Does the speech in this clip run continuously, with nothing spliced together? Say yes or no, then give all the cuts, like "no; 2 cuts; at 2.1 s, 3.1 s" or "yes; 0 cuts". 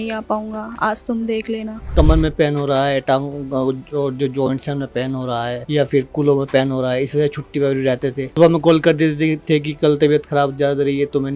no; 3 cuts; at 1.9 s, 5.6 s, 8.2 s